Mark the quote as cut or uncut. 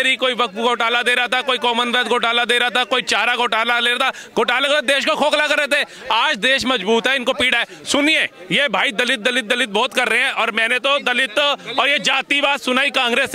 uncut